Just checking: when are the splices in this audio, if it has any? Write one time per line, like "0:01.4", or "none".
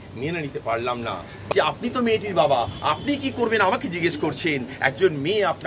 0:01.4